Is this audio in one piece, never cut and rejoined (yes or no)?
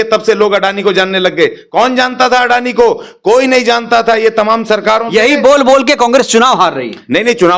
yes